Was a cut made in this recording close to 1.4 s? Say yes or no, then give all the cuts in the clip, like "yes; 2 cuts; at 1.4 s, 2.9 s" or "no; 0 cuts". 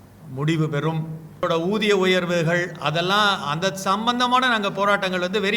yes; 1 cut; at 1.4 s